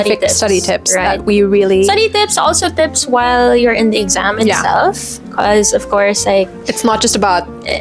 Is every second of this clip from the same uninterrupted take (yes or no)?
yes